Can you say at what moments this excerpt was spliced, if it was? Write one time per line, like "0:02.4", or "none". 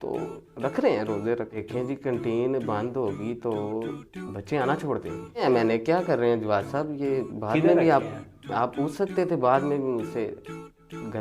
0:01.5
0:05.4